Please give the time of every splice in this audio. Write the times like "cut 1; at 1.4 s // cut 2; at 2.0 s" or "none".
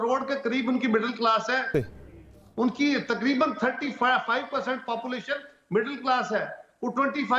none